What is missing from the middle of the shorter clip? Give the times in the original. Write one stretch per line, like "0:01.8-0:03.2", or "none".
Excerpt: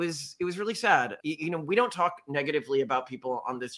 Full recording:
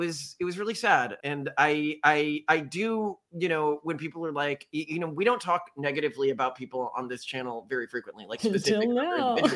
0:01.2-0:04.7